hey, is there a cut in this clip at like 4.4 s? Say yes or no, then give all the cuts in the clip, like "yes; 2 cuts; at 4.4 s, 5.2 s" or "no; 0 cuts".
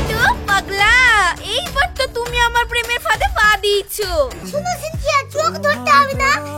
yes; 1 cut; at 4.4 s